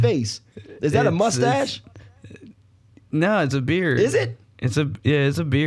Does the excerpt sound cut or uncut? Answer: uncut